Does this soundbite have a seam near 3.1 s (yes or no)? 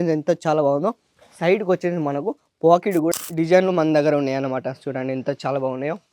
yes